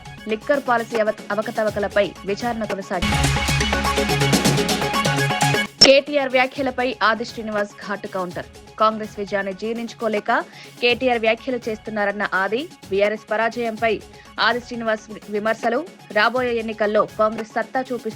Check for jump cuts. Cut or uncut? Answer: cut